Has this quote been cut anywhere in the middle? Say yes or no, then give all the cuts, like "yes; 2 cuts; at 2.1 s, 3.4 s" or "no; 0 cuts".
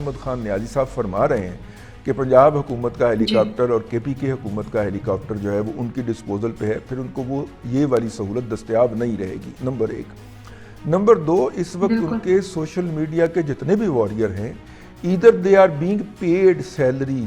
no; 0 cuts